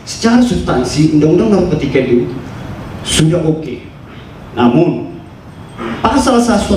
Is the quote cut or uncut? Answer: uncut